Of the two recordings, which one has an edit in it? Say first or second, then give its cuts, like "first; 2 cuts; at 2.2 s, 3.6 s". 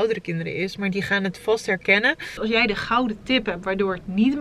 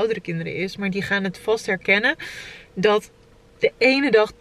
first; 1 cut; at 2.3 s